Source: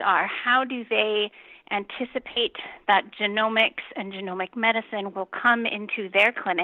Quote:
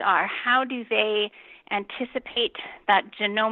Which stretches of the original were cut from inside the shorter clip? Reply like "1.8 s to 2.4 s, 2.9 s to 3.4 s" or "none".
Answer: none